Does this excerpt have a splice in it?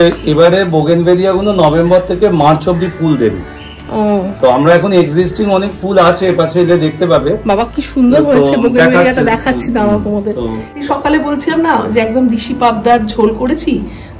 yes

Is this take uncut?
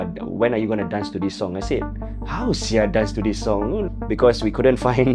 no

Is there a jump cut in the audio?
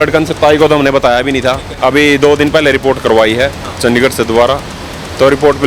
yes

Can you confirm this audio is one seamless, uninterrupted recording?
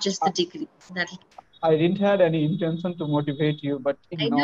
no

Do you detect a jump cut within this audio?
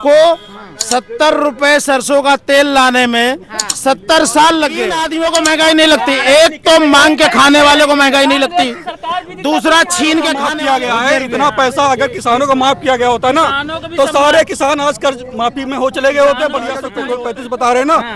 yes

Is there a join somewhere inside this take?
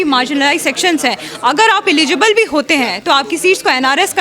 no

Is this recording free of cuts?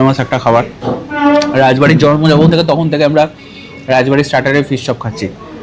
yes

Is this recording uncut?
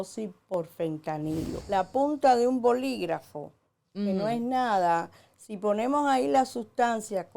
no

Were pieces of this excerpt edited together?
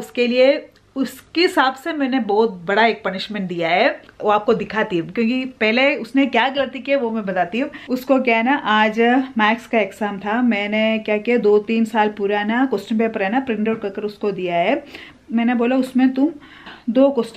no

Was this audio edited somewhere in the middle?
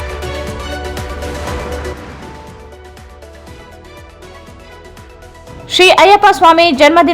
no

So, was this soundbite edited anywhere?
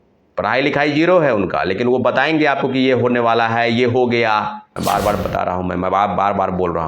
yes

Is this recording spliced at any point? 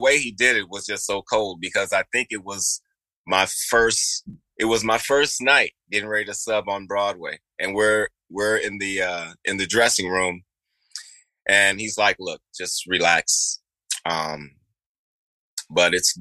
no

